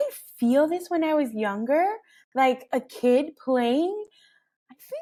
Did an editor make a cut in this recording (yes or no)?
no